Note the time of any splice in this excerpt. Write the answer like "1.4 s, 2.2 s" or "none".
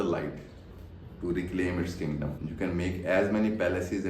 2.4 s